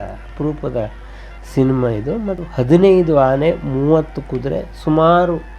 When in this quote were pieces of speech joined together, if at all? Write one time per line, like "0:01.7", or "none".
0:02.4